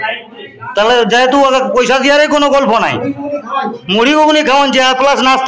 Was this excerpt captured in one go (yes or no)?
yes